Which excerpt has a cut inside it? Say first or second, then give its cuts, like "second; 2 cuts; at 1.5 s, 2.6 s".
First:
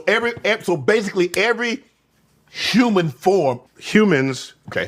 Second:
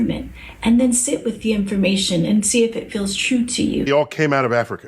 second; 1 cut; at 3.9 s